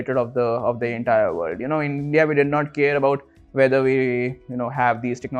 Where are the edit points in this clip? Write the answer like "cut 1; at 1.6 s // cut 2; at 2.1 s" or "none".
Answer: none